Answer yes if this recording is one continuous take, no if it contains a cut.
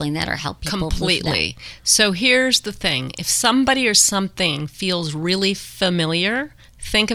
yes